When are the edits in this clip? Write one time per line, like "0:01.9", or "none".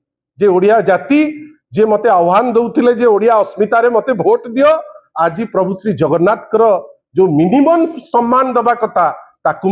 none

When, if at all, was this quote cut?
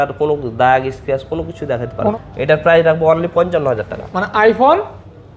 0:02.1

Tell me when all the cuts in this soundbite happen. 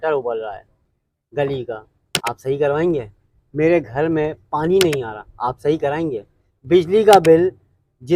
none

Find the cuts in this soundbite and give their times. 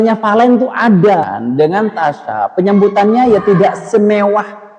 0:01.3

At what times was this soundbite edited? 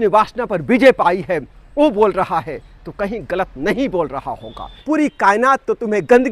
0:04.7

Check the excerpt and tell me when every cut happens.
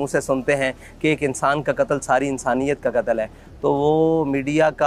none

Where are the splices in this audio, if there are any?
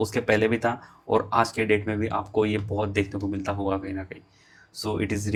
none

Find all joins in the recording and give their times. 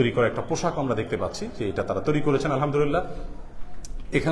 none

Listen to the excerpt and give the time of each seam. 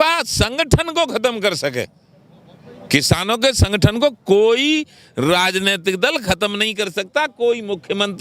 none

